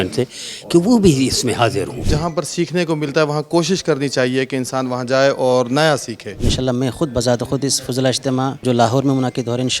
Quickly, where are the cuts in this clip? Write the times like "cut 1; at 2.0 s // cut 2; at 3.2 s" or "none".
cut 1; at 2.0 s // cut 2; at 6.5 s // cut 3; at 8.6 s